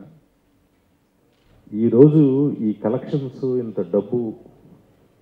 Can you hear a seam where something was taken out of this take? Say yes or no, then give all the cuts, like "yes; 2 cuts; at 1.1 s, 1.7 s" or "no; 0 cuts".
yes; 1 cut; at 1.3 s